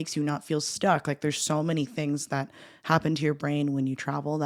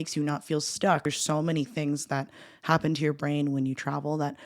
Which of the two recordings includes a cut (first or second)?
second